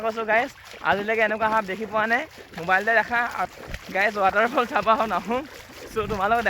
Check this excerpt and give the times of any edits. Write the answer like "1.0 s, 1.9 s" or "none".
3.5 s, 5.7 s